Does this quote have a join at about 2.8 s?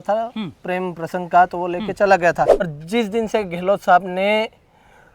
yes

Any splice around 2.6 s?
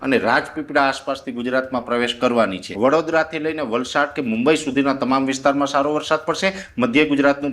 yes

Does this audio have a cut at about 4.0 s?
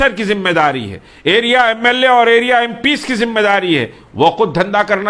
no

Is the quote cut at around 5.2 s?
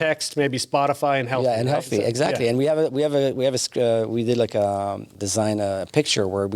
yes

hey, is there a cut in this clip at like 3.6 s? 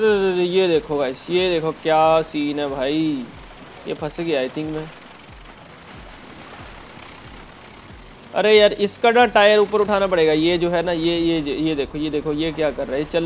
no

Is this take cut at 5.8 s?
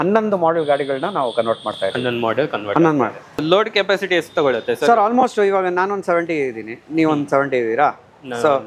no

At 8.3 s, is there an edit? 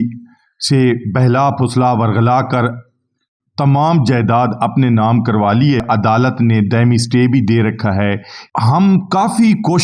yes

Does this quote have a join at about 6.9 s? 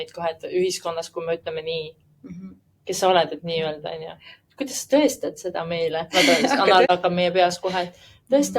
yes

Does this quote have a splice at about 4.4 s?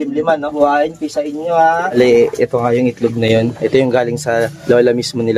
no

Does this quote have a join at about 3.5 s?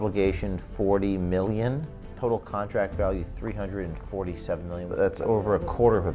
no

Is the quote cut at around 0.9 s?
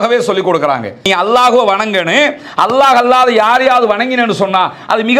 no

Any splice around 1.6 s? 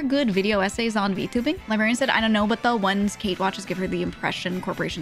yes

